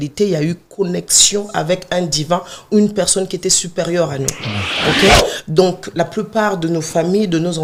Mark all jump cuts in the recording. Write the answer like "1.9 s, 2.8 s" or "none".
none